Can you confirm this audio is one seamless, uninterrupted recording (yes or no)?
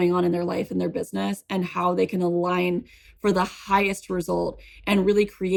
yes